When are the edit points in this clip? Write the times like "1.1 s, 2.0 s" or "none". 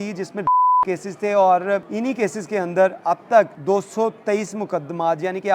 1.9 s, 3.6 s